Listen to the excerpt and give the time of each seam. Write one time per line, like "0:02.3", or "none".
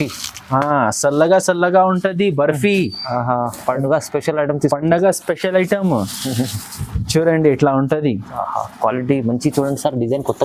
none